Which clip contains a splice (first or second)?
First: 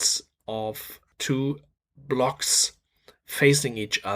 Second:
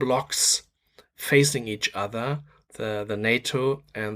first